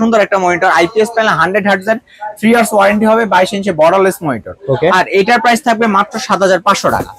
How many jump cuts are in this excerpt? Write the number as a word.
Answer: zero